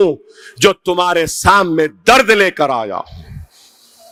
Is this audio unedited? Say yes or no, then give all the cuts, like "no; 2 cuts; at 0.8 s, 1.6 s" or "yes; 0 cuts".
yes; 0 cuts